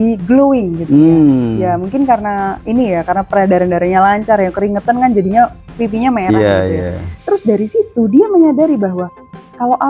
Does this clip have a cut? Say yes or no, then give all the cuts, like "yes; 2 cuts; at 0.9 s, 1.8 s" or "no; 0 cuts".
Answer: no; 0 cuts